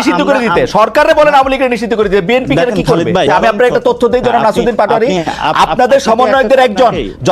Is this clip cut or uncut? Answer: cut